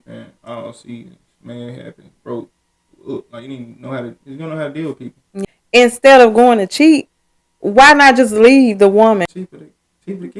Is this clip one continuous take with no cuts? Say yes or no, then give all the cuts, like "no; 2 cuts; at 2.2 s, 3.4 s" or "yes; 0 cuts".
no; 2 cuts; at 5.4 s, 9.3 s